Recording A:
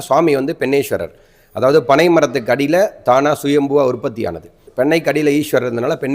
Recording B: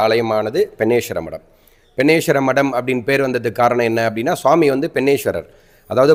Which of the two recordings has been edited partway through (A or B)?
A